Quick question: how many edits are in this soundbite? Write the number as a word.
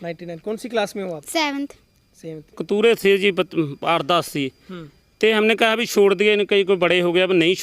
one